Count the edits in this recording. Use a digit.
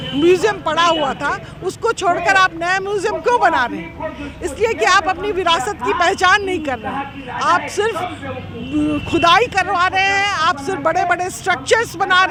0